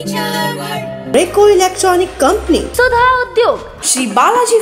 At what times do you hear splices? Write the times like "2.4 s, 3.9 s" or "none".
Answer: 1.0 s